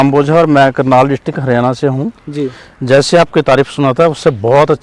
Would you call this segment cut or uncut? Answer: uncut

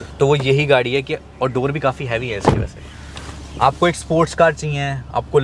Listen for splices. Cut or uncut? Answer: uncut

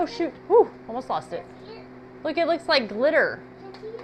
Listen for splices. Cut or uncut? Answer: uncut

